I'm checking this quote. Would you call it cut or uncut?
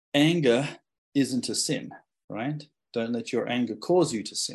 uncut